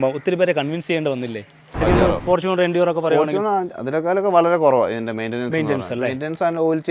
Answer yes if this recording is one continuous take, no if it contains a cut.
no